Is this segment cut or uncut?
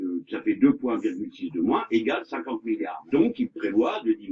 cut